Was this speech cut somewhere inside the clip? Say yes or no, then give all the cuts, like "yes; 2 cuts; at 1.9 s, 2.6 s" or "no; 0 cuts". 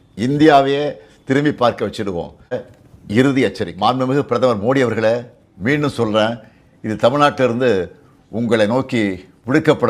yes; 2 cuts; at 2.7 s, 3.7 s